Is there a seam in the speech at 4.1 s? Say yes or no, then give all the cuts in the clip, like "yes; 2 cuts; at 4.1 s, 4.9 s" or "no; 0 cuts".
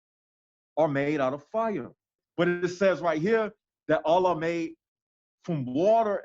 no; 1 cut; at 2.2 s